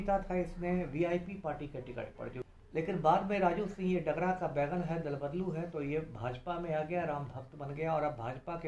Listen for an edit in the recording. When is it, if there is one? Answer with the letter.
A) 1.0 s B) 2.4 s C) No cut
B